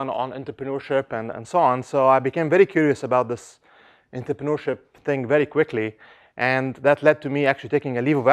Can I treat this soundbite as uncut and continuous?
no; 1 cut; at 6.1 s

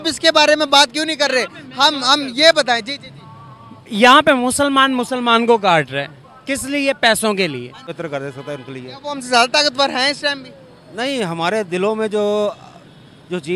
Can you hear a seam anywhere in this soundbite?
yes; 1 cut; at 7.9 s

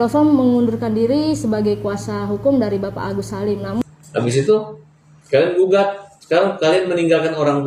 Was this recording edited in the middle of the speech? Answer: yes; 1 cut; at 3.8 s

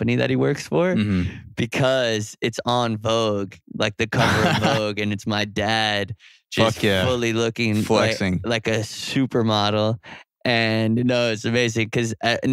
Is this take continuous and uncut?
yes; 0 cuts

